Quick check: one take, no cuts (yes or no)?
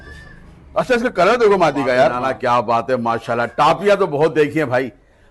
no